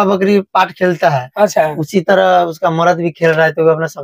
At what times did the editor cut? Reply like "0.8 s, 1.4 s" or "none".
none